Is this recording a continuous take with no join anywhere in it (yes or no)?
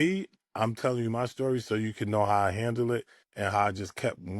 no